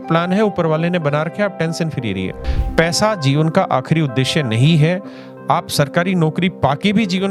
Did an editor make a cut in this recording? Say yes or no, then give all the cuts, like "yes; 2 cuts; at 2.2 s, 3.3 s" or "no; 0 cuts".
yes; 1 cut; at 2.4 s